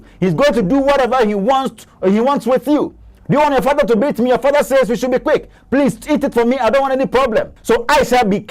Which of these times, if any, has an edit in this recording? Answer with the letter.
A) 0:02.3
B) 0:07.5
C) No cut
B